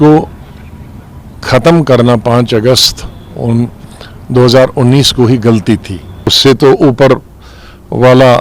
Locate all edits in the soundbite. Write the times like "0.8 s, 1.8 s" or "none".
6.3 s